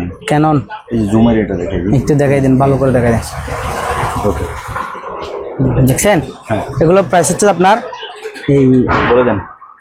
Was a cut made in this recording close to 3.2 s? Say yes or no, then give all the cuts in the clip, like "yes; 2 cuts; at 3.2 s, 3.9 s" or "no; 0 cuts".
no; 0 cuts